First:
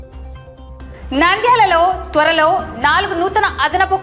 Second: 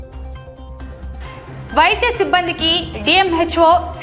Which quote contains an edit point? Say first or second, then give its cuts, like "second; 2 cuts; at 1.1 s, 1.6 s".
second; 1 cut; at 0.9 s